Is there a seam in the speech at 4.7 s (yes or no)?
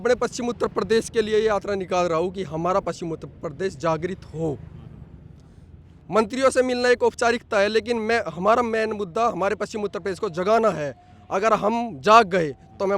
no